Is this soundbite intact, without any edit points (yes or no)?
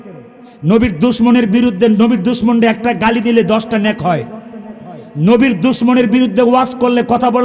yes